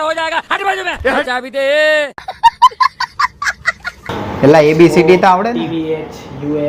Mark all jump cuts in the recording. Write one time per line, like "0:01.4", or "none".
0:01.3
0:02.3
0:04.0